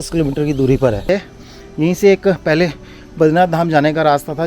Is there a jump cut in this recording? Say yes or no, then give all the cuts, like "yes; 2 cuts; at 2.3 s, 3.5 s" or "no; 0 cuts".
yes; 1 cut; at 1.1 s